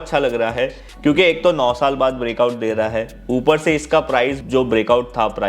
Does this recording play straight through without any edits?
no; 1 cut; at 4.4 s

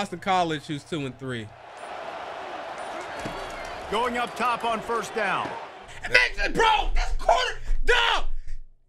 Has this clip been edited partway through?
no; 0 cuts

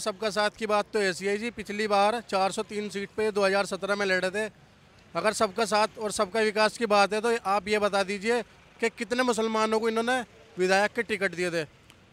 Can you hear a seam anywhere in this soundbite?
no; 0 cuts

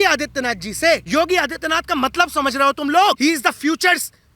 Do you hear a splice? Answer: yes; 2 cuts; at 1.0 s, 3.2 s

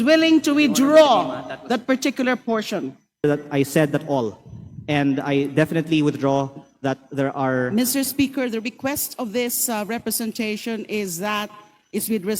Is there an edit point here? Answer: yes; 1 cut; at 3.2 s

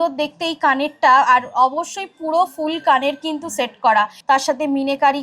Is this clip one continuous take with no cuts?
no; 1 cut; at 4.2 s

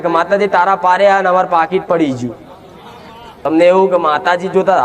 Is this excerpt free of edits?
no; 1 cut; at 3.5 s

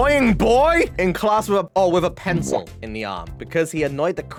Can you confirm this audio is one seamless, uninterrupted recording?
yes; 0 cuts

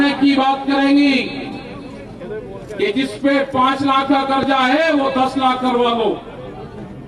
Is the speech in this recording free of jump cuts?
yes; 0 cuts

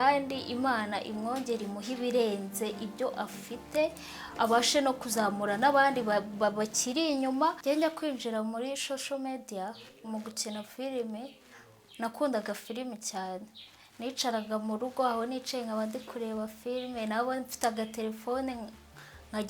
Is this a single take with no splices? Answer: no; 1 cut; at 7.6 s

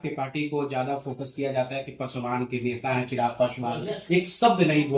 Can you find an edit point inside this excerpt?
no; 0 cuts

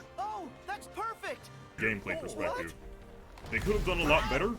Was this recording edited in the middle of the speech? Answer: yes; 1 cut; at 1.8 s

